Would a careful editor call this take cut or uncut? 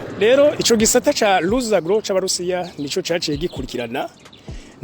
uncut